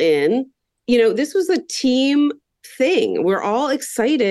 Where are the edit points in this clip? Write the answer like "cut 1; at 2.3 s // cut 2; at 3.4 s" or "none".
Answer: none

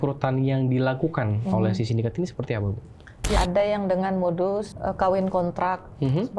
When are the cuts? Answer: cut 1; at 3.3 s

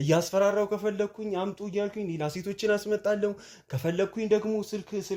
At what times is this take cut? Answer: none

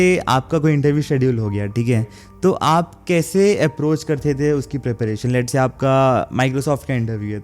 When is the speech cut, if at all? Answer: none

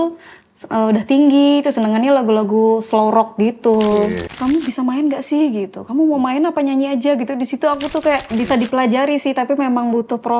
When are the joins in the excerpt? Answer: cut 1; at 4.3 s // cut 2; at 8.3 s

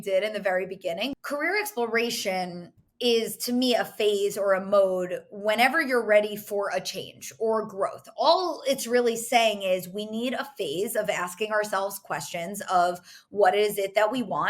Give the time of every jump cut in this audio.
cut 1; at 1.1 s

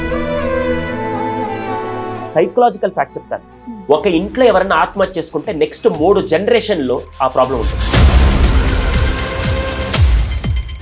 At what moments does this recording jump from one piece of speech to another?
cut 1; at 2.2 s

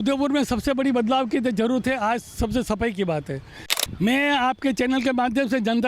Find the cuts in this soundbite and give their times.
cut 1; at 3.7 s

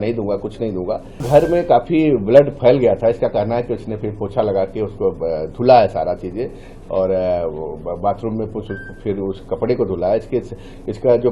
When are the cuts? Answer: cut 1; at 1.2 s

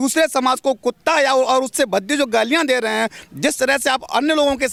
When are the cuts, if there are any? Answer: none

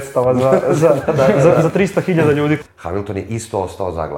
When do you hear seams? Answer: cut 1; at 2.6 s

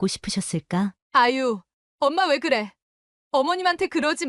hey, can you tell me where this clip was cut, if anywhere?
cut 1; at 1.0 s

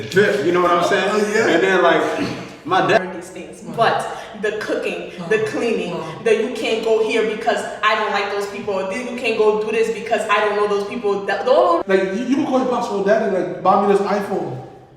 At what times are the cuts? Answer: cut 1; at 3.0 s // cut 2; at 11.8 s

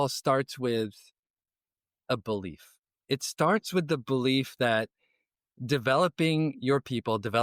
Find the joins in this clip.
none

